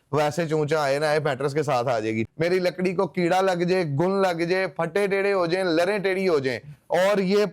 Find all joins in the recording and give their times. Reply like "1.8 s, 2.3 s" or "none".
2.3 s